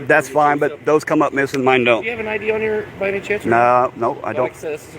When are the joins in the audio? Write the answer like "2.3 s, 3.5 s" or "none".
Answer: 2.1 s